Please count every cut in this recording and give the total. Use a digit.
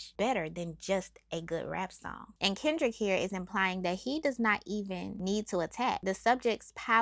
1